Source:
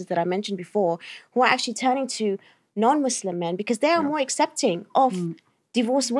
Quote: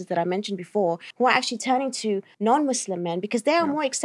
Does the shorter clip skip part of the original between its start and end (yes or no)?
yes